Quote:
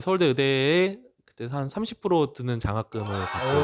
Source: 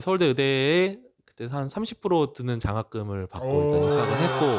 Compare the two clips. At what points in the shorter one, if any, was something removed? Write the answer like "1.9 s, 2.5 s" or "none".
none